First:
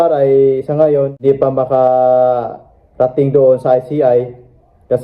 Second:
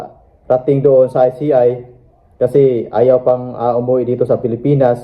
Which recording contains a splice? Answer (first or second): first